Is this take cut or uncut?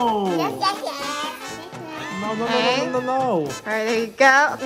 uncut